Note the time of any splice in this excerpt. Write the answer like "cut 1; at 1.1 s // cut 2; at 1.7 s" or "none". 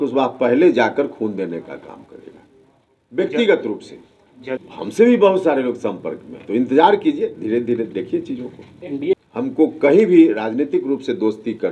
cut 1; at 4.6 s // cut 2; at 9.1 s